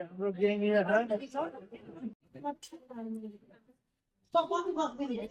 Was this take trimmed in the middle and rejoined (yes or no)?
yes